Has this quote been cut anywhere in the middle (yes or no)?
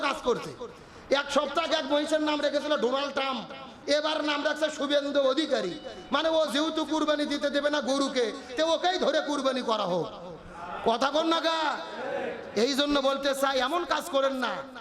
yes